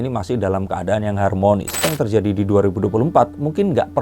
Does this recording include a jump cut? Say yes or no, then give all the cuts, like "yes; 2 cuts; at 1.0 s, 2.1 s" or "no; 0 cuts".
yes; 1 cut; at 1.9 s